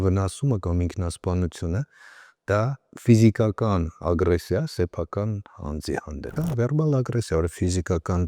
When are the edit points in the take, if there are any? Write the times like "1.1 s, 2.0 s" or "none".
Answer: 6.3 s